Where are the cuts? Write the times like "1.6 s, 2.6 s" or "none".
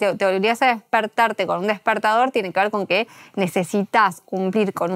none